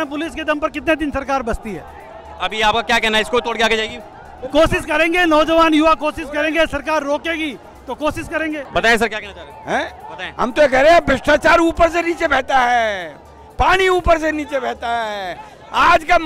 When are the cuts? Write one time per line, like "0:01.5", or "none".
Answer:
none